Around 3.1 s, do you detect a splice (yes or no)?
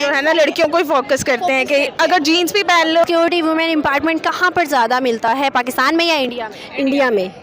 yes